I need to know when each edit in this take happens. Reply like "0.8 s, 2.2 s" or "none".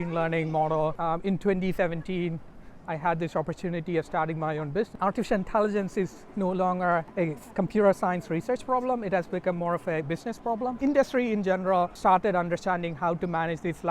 1.0 s, 4.9 s, 7.1 s, 10.7 s, 11.9 s